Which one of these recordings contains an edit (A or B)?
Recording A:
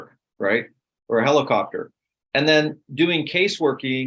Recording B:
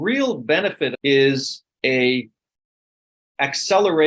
B